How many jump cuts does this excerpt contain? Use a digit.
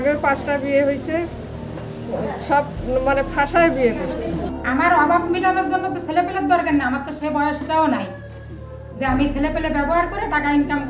1